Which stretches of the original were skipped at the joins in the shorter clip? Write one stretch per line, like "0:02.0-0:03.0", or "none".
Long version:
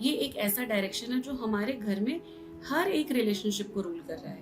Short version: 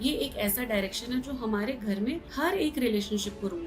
0:02.3-0:02.6